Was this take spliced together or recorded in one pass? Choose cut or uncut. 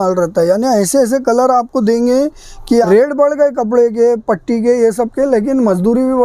cut